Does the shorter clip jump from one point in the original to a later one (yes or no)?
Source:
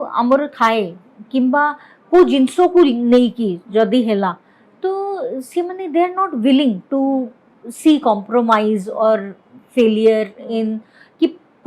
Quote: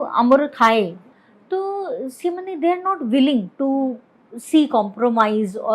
yes